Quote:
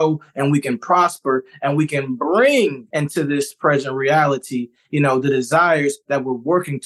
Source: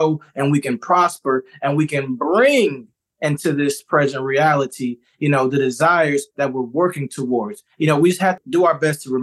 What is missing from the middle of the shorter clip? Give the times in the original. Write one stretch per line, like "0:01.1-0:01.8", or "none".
0:02.8-0:03.1